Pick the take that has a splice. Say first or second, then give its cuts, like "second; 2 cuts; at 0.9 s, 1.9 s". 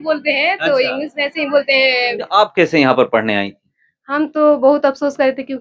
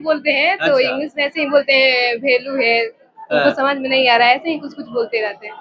first; 1 cut; at 2.2 s